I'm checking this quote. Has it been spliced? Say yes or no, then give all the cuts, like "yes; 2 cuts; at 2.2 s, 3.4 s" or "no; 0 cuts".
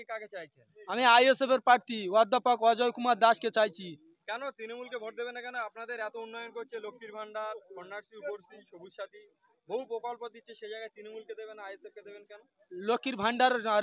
no; 0 cuts